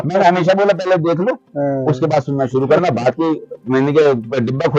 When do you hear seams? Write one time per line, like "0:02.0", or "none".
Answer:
none